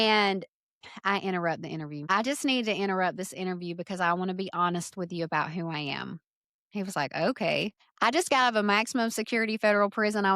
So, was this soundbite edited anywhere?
yes; 2 cuts; at 2.1 s, 7.8 s

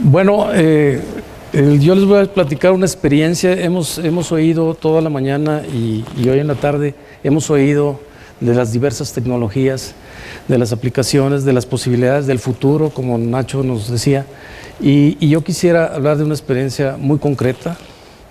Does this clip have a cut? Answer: no; 0 cuts

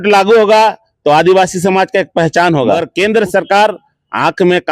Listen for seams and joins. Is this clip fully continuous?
no; 1 cut; at 2.9 s

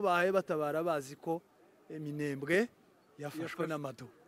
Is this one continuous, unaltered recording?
yes; 0 cuts

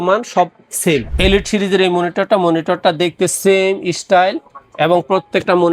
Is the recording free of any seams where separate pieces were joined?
no; 1 cut; at 1.1 s

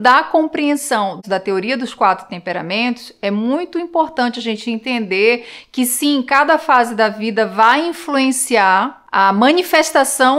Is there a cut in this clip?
yes; 1 cut; at 1.2 s

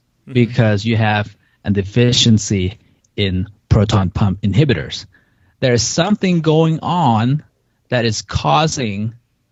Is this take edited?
no; 0 cuts

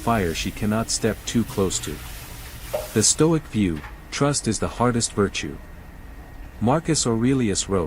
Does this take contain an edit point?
no; 0 cuts

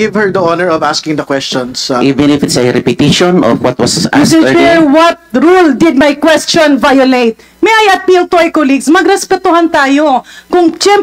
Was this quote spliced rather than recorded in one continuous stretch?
no; 0 cuts

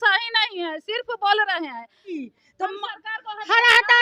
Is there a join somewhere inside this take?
yes; 1 cut; at 2.2 s

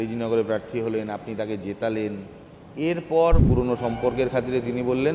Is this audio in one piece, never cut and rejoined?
no; 1 cut; at 3.5 s

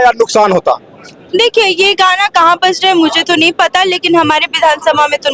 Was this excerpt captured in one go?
yes; 0 cuts

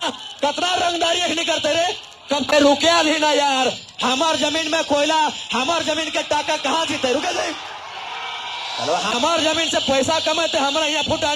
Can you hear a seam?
yes; 1 cut; at 2.5 s

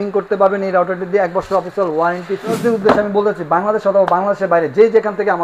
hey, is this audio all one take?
no; 1 cut; at 2.6 s

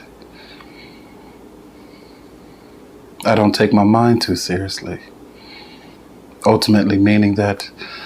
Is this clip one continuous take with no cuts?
no; 1 cut; at 6.0 s

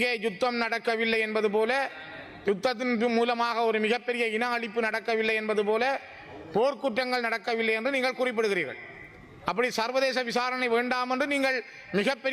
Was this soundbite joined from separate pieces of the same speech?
no; 0 cuts

